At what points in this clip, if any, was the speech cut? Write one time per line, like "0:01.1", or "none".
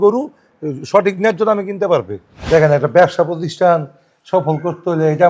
0:02.5